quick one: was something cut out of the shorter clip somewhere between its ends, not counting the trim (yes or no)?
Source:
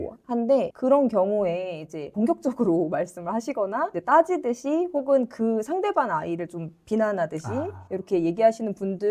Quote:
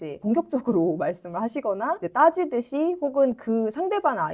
no